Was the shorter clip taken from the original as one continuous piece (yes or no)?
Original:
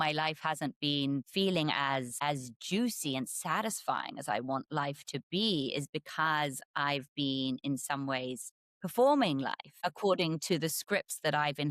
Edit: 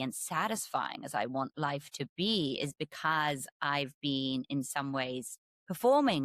yes